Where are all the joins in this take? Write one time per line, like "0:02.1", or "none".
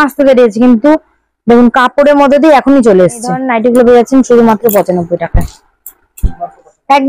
0:03.5